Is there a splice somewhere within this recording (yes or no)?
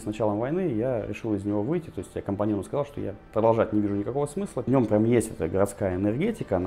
yes